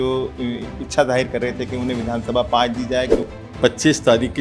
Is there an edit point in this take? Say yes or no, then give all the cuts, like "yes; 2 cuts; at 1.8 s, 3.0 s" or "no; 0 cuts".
yes; 1 cut; at 3.2 s